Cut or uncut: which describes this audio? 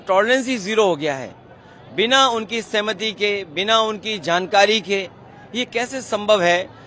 uncut